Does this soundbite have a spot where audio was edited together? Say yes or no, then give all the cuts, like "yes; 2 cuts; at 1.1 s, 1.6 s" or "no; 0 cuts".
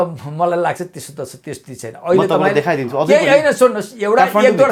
no; 0 cuts